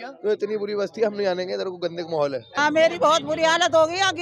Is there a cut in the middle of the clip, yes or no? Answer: yes